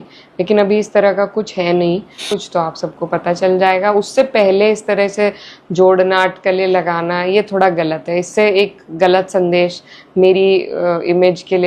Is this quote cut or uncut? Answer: cut